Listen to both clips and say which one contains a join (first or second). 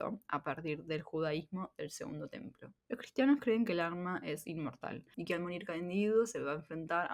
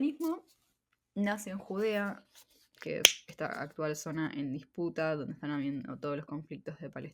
first